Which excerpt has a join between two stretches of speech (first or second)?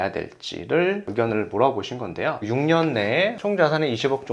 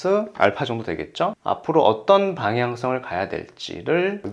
first